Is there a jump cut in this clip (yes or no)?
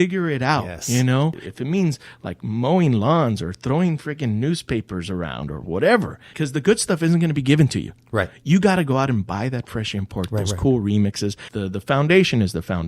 yes